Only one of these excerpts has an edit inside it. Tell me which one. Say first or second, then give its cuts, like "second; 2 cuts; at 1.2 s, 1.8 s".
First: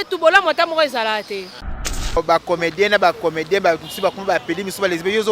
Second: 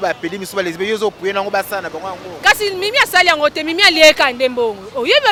first; 1 cut; at 2.0 s